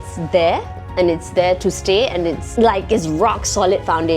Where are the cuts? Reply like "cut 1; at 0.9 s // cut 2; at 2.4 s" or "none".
cut 1; at 2.4 s